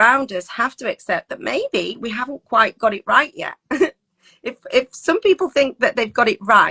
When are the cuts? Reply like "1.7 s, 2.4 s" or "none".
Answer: none